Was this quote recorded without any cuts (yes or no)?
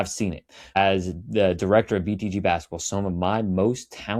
yes